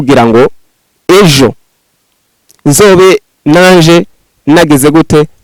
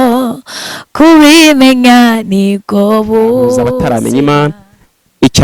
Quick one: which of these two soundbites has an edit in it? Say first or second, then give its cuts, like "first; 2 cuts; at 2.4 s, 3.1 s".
second; 1 cut; at 3.8 s